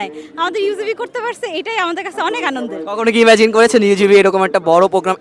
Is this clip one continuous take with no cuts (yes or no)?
yes